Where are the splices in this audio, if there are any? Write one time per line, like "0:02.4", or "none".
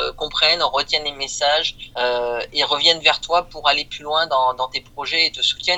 none